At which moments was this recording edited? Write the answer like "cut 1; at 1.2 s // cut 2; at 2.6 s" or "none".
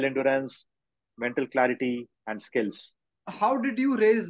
cut 1; at 3.2 s